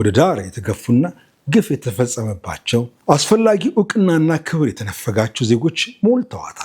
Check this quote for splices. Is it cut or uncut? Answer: cut